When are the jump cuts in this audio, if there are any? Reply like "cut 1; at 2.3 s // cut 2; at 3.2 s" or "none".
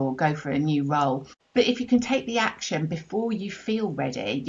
cut 1; at 1.4 s

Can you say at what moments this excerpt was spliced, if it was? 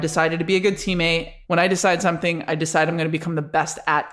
cut 1; at 1.3 s

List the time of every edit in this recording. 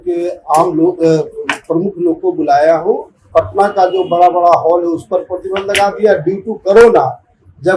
cut 1; at 3.1 s

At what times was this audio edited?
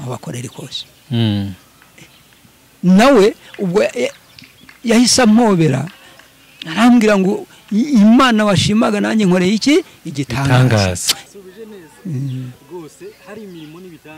cut 1; at 11.1 s

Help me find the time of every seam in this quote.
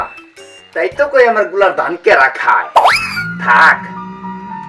none

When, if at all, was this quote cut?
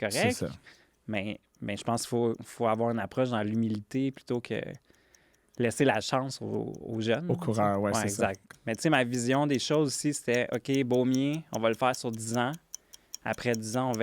cut 1; at 8.5 s

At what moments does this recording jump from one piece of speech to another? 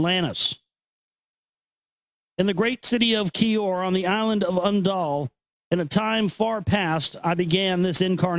cut 1; at 2.9 s

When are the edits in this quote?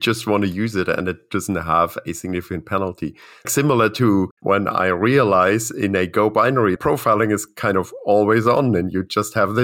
cut 1; at 3.5 s // cut 2; at 4.3 s // cut 3; at 6.8 s

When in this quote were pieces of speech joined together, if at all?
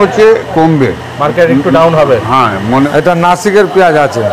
cut 1; at 2.9 s

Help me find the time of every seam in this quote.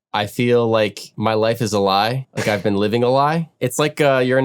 cut 1; at 1.0 s // cut 2; at 2.3 s // cut 3; at 3.5 s

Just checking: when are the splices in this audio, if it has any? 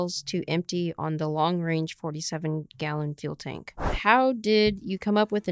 cut 1; at 3.8 s

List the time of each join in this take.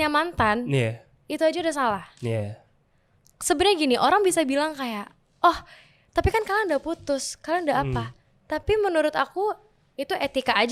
none

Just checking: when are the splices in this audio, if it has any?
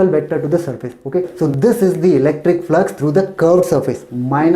cut 1; at 1.3 s

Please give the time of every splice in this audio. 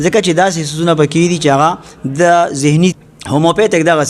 cut 1; at 3.1 s

